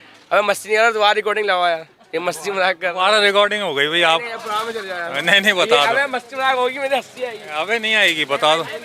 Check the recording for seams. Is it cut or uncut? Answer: uncut